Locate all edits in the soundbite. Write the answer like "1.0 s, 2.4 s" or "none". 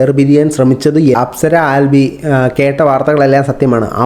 1.2 s